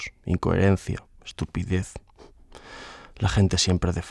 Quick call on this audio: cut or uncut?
uncut